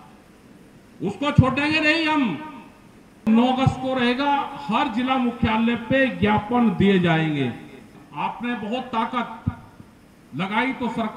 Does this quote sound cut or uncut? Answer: cut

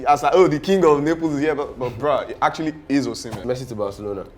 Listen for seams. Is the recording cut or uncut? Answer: cut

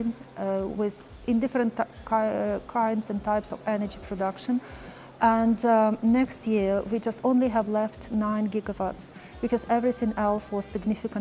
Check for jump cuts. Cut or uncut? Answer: uncut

